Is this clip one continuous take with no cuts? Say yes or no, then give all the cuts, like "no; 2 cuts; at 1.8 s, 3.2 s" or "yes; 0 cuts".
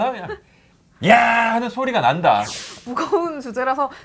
no; 1 cut; at 2.5 s